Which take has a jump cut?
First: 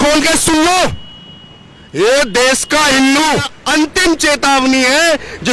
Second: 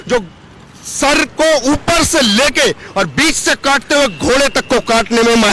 first; 1 cut; at 3.6 s

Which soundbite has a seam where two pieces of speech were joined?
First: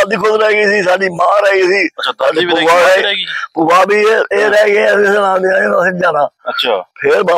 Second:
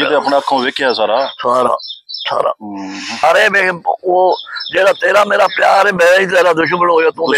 second; 1 cut; at 3.2 s

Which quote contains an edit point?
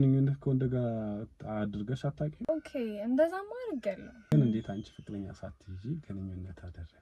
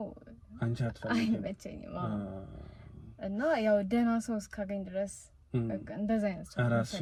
first; 1 cut; at 4.3 s

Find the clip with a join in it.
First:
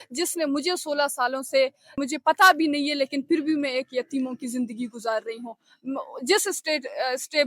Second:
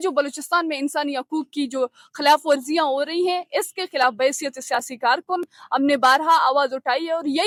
first; 1 cut; at 1.9 s

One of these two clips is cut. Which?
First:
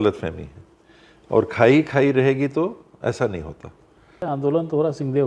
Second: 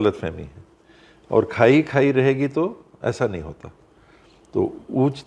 first; 1 cut; at 4.2 s

